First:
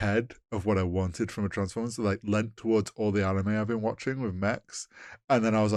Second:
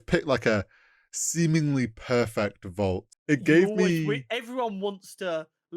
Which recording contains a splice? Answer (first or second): second